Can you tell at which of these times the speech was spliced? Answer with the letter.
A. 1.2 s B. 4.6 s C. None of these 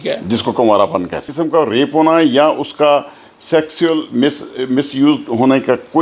A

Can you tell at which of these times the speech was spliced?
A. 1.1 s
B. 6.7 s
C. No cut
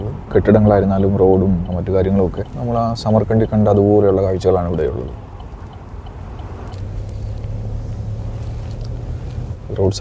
B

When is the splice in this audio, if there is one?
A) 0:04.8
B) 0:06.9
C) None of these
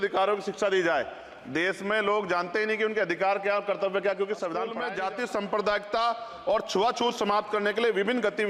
A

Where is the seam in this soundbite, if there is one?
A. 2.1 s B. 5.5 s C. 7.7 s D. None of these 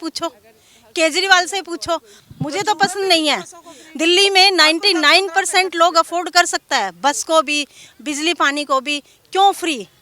A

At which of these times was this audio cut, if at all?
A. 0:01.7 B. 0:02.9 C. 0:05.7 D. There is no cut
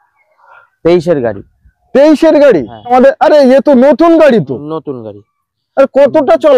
B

